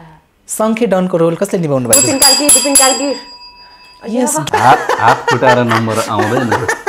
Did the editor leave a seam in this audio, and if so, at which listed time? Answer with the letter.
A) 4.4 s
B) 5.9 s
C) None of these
A